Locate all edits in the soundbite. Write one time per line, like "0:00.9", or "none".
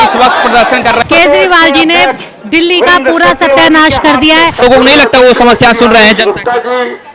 0:01.0
0:04.6